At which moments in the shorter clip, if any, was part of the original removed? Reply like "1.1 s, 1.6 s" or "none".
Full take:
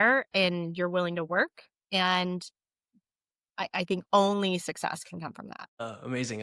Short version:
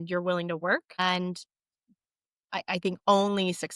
1.0 s